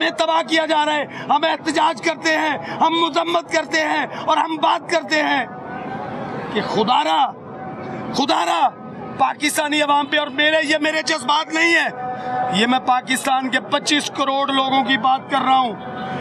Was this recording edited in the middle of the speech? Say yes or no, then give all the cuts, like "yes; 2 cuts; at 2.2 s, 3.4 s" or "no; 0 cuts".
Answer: no; 0 cuts